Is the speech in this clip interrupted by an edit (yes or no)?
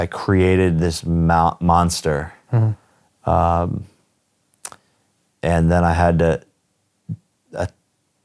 no